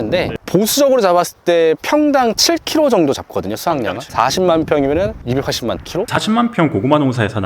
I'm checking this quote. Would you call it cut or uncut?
cut